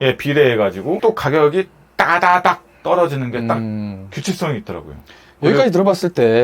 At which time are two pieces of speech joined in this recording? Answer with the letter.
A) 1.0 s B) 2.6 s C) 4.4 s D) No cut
A